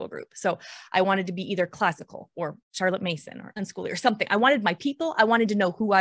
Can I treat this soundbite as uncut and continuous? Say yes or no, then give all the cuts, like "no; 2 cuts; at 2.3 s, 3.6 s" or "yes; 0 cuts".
no; 1 cut; at 2.6 s